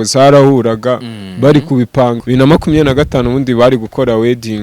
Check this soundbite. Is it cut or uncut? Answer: cut